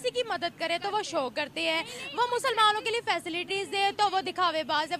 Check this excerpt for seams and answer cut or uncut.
uncut